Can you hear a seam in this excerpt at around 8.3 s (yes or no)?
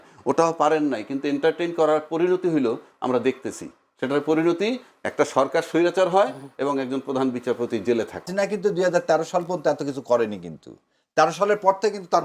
yes